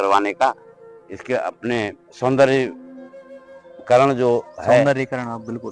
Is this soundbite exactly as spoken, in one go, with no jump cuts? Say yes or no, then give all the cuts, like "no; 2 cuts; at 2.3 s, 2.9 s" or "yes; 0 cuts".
yes; 0 cuts